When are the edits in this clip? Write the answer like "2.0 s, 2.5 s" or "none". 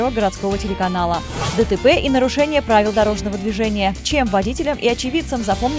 1.2 s